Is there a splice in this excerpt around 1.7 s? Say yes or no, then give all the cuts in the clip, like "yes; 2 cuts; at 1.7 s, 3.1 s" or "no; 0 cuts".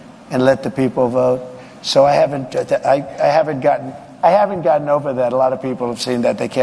yes; 1 cut; at 1.7 s